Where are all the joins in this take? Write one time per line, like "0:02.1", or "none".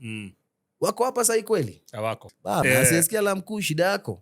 0:02.4

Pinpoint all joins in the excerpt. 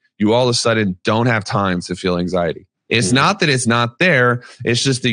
0:02.7

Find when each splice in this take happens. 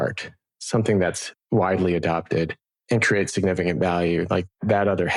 none

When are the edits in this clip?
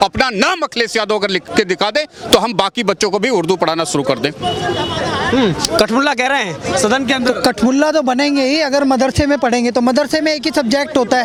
none

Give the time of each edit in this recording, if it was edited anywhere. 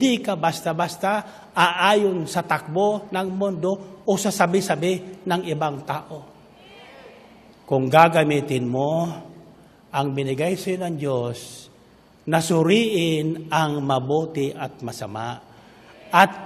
none

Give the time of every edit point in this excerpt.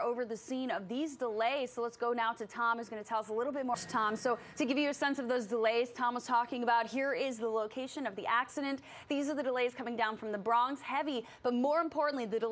none

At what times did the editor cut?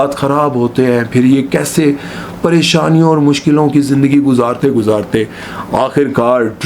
none

